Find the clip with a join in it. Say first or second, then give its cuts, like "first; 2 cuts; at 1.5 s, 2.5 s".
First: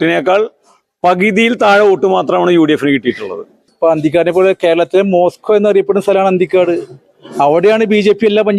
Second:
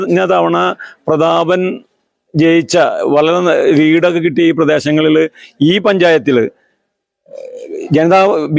first; 1 cut; at 3.7 s